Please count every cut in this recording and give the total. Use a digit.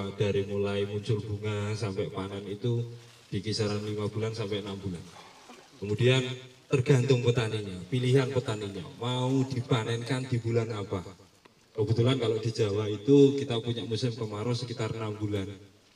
0